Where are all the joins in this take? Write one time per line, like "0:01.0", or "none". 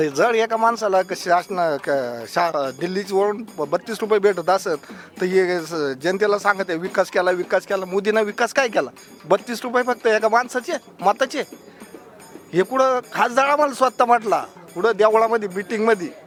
none